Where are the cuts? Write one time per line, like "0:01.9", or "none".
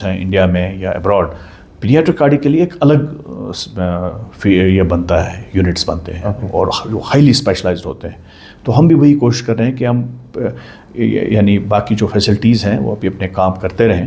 none

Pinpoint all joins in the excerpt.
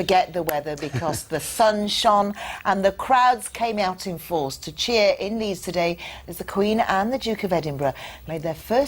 0:07.4

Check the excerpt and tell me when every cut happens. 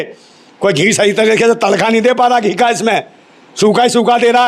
none

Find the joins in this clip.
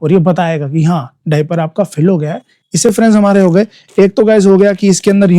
0:02.9

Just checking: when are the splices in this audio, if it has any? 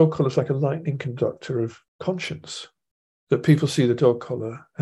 0:01.9

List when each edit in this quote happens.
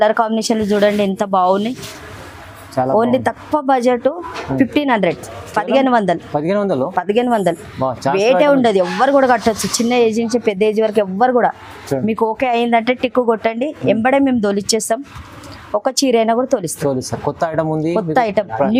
none

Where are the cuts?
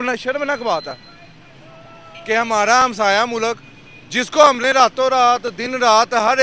none

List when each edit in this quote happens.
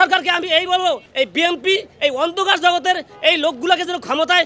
0:01.1

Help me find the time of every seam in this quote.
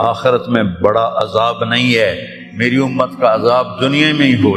none

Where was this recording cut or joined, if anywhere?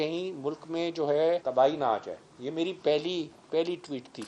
0:01.4

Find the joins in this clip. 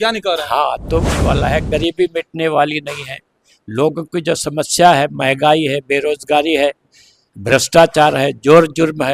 0:01.1

